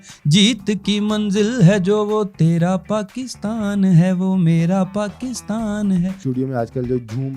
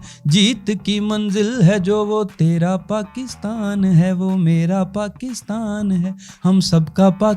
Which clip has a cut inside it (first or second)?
first